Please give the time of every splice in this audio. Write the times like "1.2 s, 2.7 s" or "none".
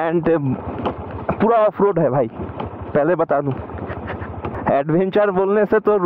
4.4 s